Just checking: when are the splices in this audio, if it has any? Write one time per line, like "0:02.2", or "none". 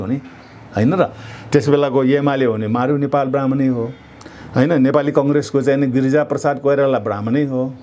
none